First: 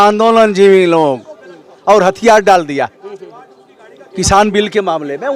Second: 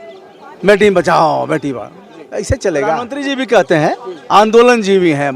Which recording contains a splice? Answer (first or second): second